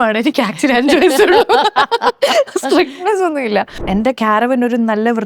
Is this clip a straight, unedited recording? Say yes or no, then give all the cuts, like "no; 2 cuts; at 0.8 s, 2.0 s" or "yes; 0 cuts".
no; 1 cut; at 3.8 s